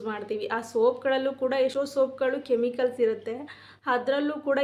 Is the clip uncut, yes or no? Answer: yes